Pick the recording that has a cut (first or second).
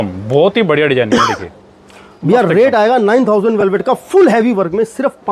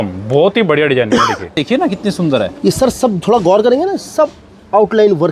second